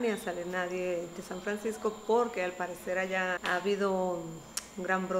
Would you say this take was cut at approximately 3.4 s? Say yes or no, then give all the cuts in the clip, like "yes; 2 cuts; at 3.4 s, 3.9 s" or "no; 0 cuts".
yes; 1 cut; at 3.4 s